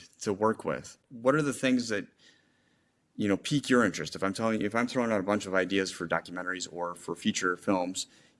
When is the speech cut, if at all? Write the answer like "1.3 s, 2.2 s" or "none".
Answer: 1.0 s

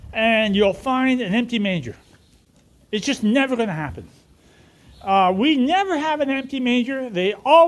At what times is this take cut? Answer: none

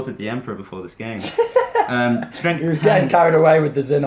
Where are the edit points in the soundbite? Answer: none

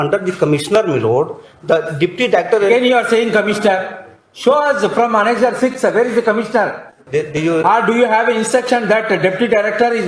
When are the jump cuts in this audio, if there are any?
6.9 s

